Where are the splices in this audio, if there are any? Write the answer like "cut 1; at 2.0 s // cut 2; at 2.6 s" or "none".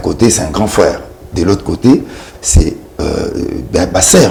none